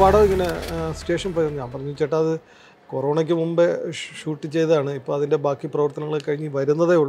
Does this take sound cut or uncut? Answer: uncut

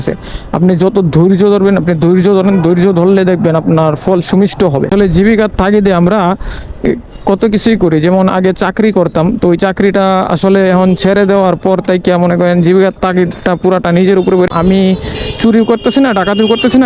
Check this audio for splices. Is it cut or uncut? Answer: cut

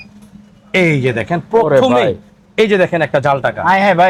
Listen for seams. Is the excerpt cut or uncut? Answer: uncut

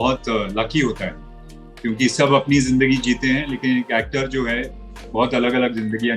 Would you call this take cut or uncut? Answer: uncut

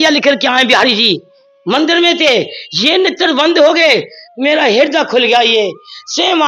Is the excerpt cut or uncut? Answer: uncut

